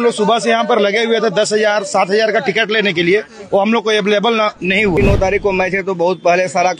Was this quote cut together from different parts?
yes; 1 cut; at 5.0 s

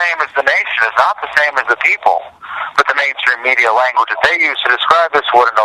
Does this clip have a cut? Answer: yes; 1 cut; at 3.5 s

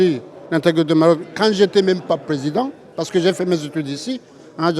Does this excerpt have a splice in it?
no; 0 cuts

